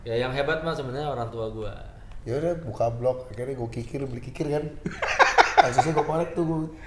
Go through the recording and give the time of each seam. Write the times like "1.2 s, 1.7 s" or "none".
2.1 s

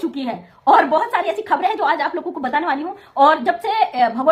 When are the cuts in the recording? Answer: none

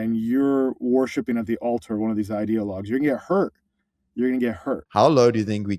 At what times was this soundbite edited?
4.9 s

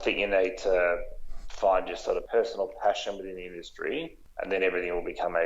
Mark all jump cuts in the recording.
2.2 s, 4.2 s

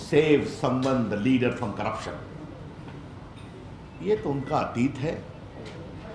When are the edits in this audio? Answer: none

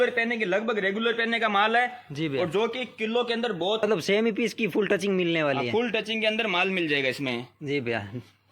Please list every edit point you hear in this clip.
3.8 s

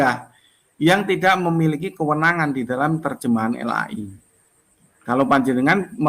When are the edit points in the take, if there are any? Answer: none

